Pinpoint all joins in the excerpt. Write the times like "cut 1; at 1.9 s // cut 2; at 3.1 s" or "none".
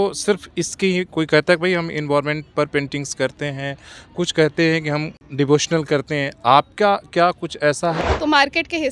cut 1; at 5.1 s // cut 2; at 8.0 s

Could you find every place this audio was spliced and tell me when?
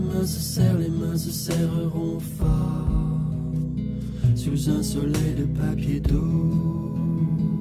none

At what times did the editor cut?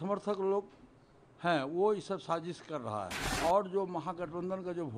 cut 1; at 3.2 s

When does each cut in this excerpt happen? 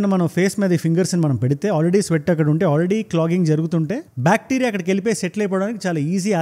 none

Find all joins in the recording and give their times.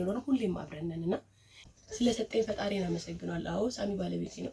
cut 1; at 1.6 s

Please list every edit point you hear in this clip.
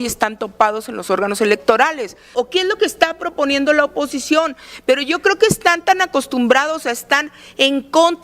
cut 1; at 2.3 s

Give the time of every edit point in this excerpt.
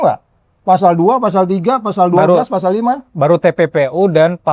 none

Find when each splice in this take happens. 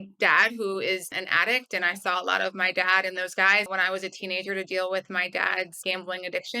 cut 1; at 1.1 s // cut 2; at 3.7 s // cut 3; at 5.8 s

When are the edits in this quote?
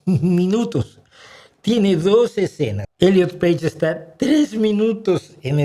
cut 1; at 2.8 s

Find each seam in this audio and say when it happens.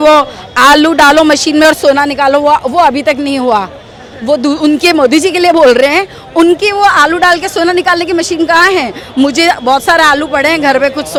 none

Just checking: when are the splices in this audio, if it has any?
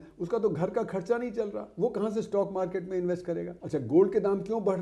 cut 1; at 3.5 s

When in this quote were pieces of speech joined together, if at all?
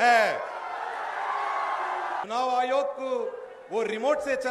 cut 1; at 2.2 s

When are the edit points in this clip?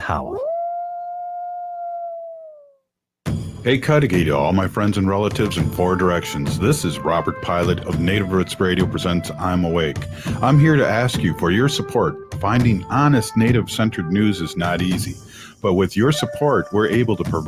cut 1; at 3.1 s

